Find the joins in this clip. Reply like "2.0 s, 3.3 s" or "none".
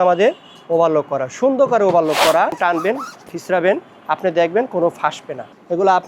2.6 s